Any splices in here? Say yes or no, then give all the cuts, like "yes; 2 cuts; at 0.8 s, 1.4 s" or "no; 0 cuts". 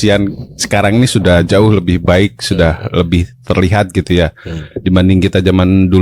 no; 0 cuts